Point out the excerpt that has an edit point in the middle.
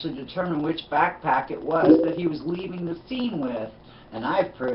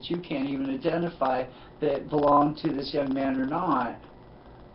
first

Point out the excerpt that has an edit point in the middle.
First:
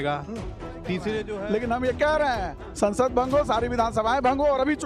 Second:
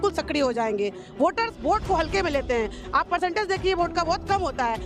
first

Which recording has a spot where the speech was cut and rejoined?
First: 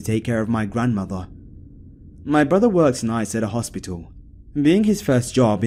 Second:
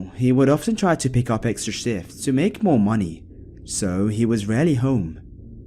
second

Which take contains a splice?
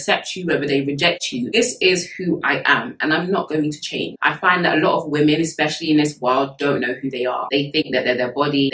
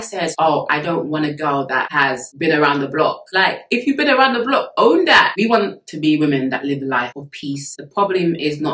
second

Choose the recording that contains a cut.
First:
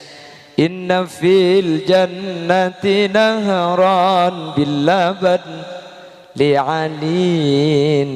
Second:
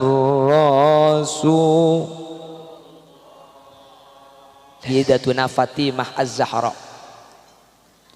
second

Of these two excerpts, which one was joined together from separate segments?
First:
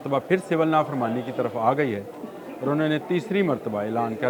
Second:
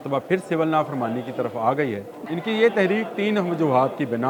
second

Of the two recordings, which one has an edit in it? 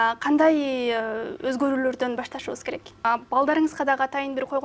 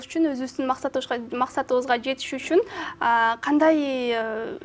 first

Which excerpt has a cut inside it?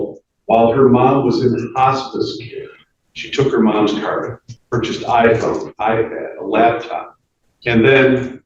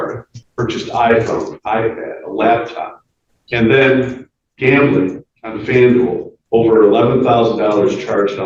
second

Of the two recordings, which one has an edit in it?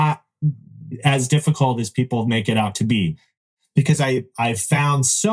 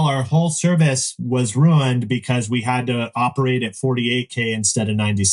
first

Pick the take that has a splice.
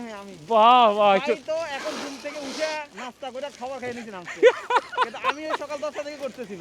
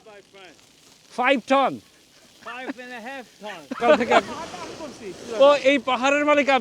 second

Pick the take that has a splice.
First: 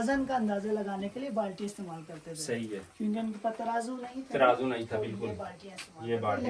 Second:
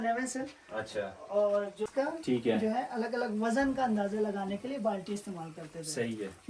second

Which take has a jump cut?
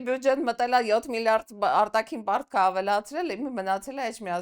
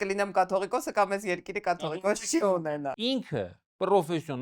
second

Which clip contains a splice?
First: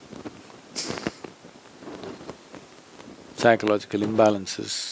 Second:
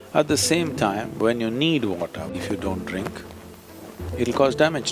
second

